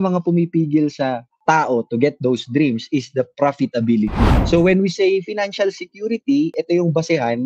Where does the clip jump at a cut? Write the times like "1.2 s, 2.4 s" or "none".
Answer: 4.4 s